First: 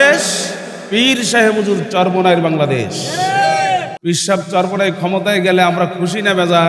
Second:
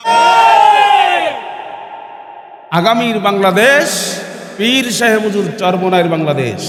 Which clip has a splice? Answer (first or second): first